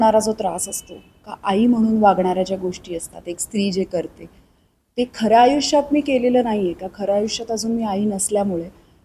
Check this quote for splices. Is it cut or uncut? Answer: uncut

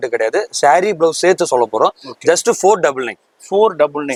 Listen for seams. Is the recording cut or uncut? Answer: uncut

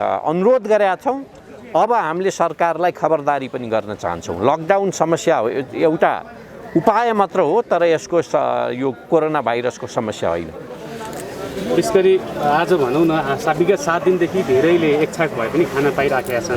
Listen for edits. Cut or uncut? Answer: uncut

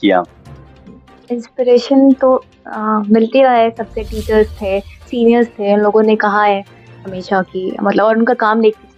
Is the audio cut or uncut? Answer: uncut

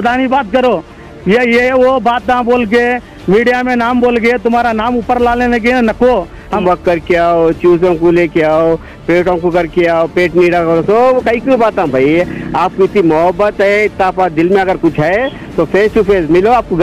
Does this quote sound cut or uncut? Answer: cut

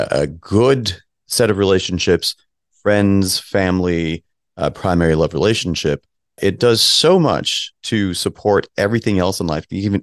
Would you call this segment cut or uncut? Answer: uncut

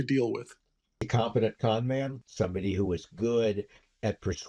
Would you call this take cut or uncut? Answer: cut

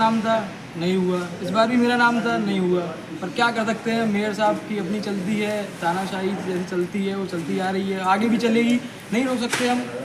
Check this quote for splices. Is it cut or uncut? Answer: uncut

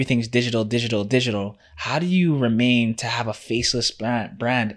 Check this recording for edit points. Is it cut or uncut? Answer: uncut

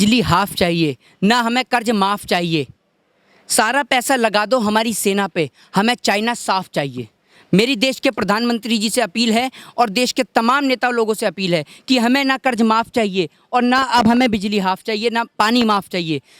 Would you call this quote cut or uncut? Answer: uncut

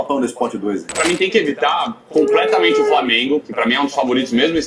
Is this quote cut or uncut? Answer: cut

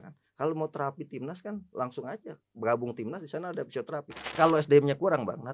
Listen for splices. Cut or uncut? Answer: cut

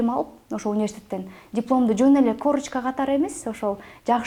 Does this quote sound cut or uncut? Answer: uncut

